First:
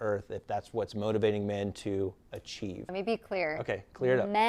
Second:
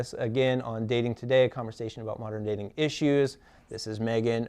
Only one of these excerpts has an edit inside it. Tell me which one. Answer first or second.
first